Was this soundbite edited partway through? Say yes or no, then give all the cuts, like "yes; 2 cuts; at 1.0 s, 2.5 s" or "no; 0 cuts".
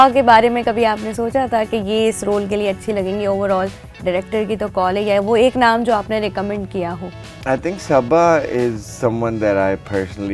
no; 0 cuts